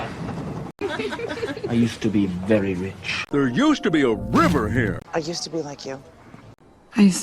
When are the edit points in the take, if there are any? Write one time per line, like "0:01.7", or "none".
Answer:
0:05.0